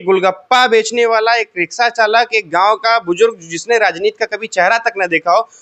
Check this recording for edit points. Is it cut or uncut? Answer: uncut